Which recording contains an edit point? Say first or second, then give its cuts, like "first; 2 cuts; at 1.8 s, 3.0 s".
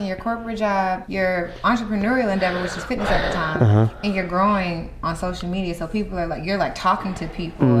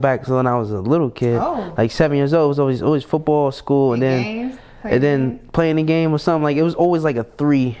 first; 1 cut; at 1.0 s